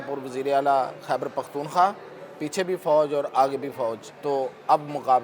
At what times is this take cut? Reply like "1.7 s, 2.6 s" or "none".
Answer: 4.1 s